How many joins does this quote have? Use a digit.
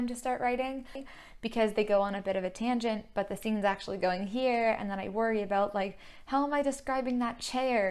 1